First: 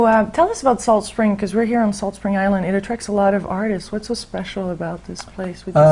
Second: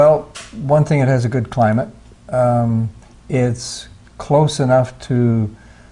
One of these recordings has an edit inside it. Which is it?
first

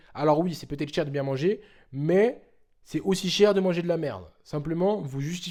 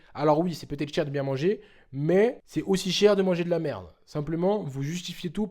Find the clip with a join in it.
second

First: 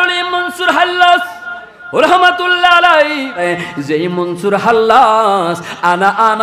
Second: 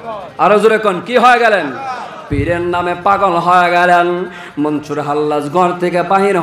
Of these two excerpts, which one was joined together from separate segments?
first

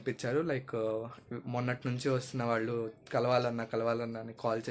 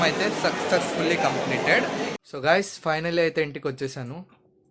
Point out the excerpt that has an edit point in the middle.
second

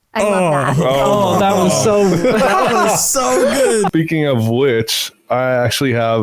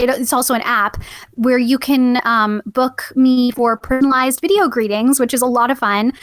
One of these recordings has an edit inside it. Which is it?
first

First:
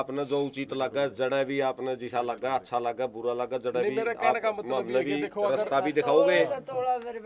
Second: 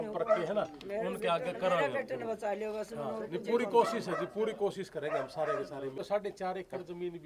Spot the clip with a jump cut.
second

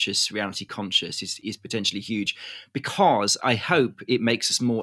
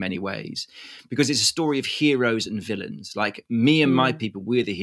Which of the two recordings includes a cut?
first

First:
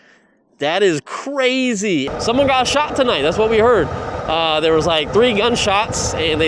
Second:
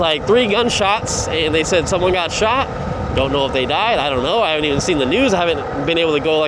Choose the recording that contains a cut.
first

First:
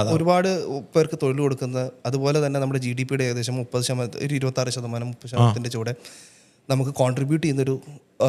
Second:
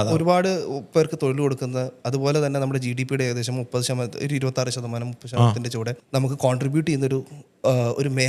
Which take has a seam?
second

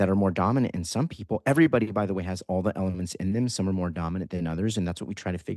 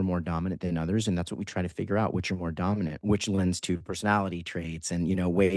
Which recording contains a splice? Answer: second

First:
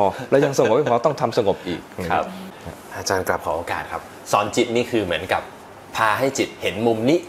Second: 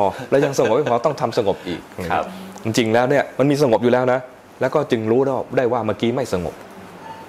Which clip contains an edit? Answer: first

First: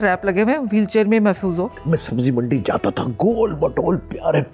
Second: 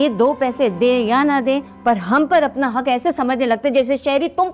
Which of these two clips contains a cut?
first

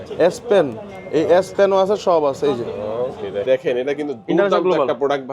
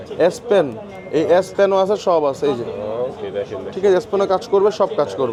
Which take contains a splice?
first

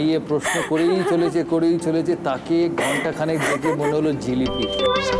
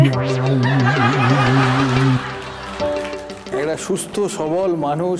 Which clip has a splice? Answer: second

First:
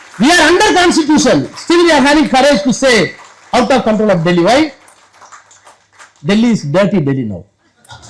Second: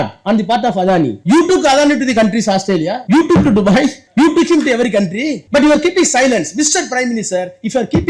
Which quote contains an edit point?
second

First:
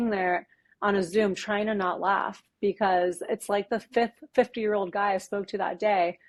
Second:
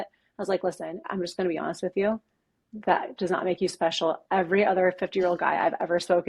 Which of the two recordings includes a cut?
second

